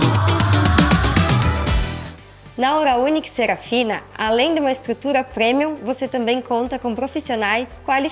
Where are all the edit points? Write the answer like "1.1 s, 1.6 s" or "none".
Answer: 2.0 s